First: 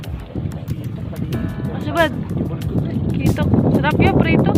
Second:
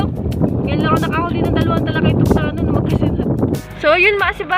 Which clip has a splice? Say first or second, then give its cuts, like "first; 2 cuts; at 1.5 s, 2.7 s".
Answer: second; 1 cut; at 3.6 s